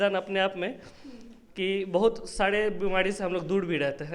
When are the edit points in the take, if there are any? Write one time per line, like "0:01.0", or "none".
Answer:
none